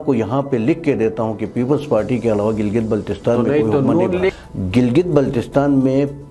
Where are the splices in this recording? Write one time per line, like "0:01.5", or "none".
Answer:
0:04.4